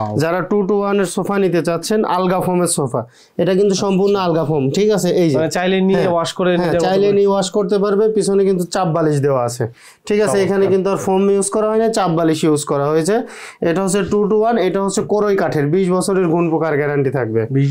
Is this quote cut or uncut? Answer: uncut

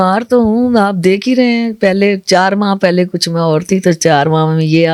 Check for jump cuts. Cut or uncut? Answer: uncut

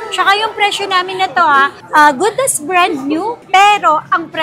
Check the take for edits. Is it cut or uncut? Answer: cut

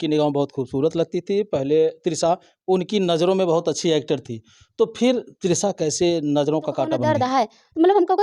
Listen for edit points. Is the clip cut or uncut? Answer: cut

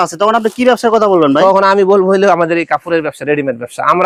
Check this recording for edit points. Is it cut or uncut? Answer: uncut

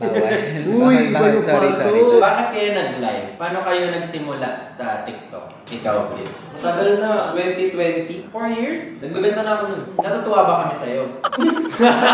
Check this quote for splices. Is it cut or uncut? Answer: cut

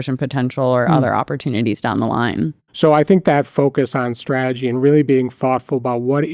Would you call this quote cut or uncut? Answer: cut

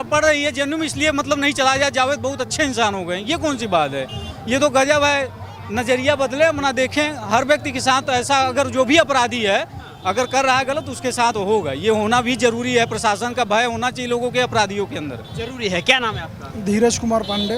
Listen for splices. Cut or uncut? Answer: uncut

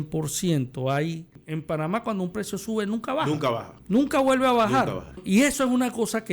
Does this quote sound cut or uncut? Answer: cut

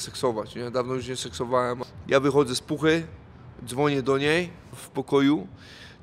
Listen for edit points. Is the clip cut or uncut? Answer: cut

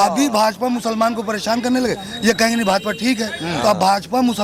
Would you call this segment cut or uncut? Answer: uncut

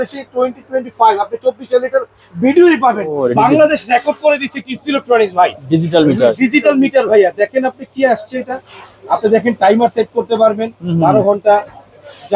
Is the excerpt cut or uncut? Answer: cut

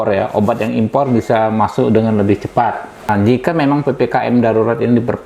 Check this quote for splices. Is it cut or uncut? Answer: cut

